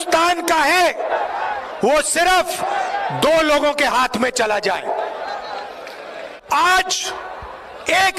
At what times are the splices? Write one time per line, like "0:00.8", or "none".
0:06.4